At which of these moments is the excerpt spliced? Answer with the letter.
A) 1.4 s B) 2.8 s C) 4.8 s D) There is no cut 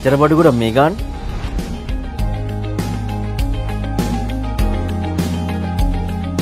D